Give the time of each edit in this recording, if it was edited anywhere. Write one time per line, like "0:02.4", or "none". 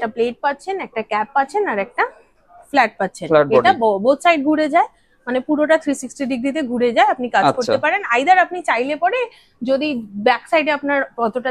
none